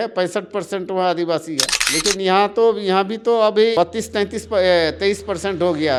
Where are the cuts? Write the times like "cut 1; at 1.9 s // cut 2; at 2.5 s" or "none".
none